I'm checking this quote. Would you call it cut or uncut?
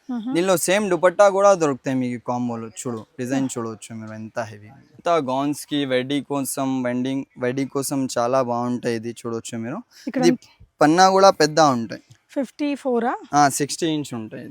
cut